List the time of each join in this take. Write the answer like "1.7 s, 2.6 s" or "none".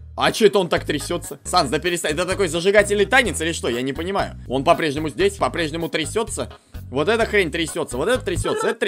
1.4 s, 4.4 s, 5.4 s

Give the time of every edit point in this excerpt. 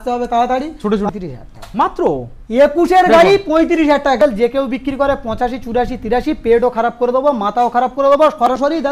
1.1 s, 4.2 s

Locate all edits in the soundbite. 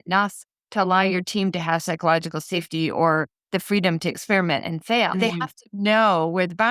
5.1 s

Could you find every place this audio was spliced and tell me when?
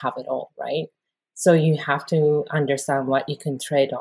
none

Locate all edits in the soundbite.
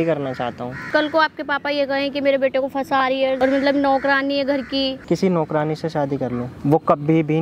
0.9 s, 3.4 s, 5.0 s

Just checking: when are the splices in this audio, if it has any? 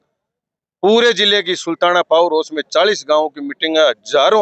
none

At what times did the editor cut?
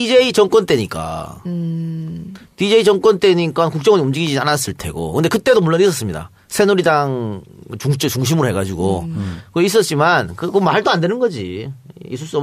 8.5 s

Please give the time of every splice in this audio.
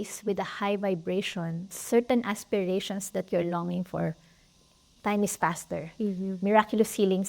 1.8 s, 4.9 s

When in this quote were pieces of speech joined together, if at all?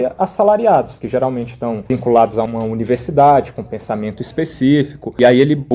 none

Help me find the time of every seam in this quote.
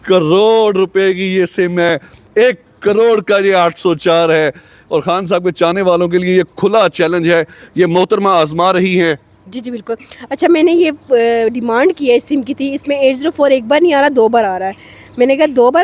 none

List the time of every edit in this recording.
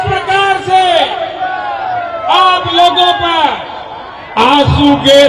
none

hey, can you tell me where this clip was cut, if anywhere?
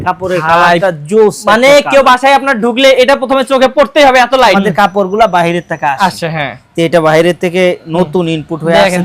4.5 s

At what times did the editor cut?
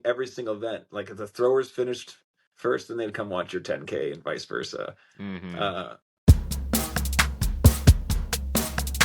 6.2 s

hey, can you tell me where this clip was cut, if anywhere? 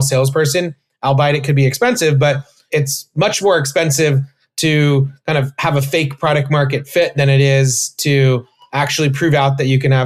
none

